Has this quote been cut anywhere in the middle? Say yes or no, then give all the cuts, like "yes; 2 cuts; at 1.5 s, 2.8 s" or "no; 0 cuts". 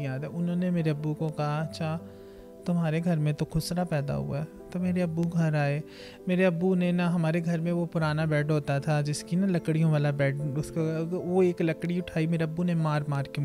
no; 0 cuts